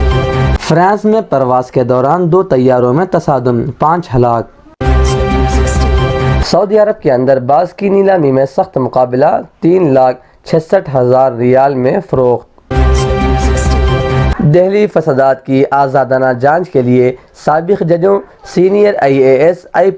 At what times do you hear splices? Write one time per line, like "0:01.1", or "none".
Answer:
0:04.8
0:06.4
0:12.7
0:14.3